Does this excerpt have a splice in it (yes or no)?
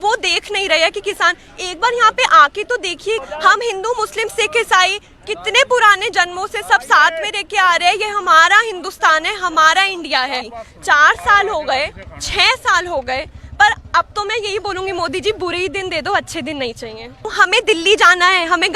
yes